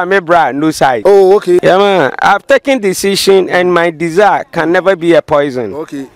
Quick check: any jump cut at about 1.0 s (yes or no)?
yes